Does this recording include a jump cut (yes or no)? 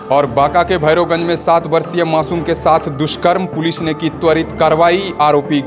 no